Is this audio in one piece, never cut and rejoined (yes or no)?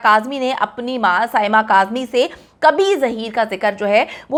yes